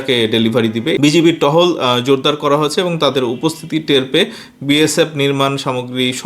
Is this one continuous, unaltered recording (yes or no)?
no